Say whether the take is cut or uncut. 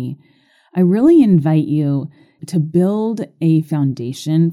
cut